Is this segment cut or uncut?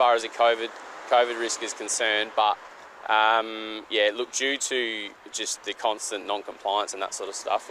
uncut